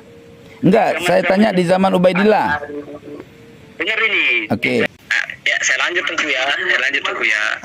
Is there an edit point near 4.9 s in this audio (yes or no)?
yes